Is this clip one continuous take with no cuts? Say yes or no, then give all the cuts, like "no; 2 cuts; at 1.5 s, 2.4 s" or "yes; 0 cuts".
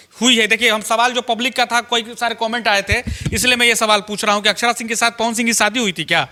yes; 0 cuts